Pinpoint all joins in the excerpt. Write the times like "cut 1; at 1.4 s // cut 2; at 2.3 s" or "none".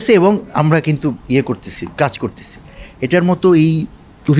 none